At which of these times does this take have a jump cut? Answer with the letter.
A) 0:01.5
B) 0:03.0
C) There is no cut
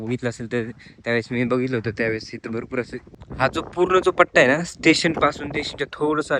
B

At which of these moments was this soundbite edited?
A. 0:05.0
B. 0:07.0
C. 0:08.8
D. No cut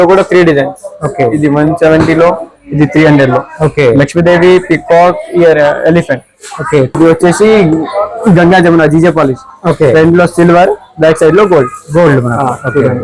B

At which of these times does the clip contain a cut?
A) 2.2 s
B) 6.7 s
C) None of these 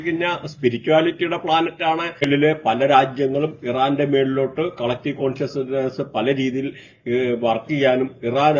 A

